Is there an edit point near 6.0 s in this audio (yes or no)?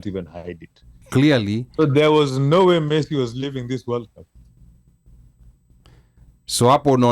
no